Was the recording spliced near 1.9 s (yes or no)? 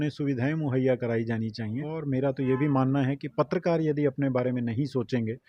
yes